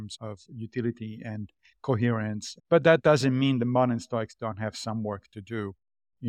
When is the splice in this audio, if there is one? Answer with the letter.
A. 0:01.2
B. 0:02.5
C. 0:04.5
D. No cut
B